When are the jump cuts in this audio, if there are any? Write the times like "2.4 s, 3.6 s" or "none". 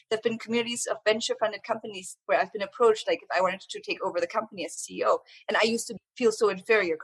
6.0 s